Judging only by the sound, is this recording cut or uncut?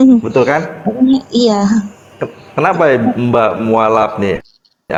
uncut